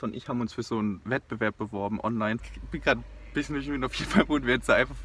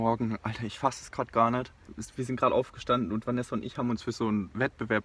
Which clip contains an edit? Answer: first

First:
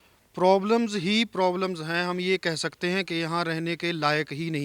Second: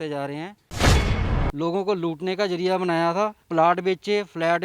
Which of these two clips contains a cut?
second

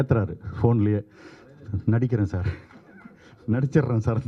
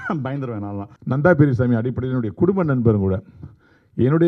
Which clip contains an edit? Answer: second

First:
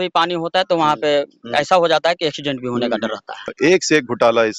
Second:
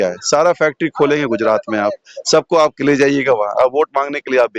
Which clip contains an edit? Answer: first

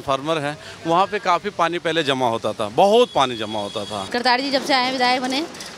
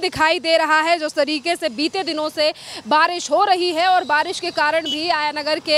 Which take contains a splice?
first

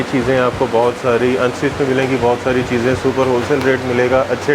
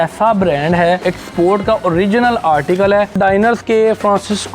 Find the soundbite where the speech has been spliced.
second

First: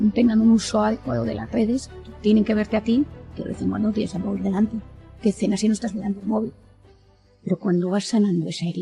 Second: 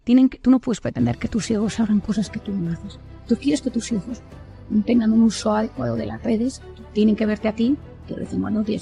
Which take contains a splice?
first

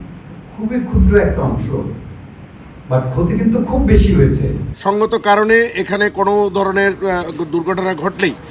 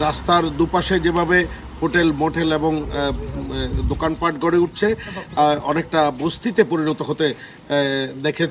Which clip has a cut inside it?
first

